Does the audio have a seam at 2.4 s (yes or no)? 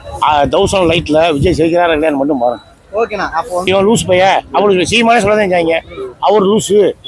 no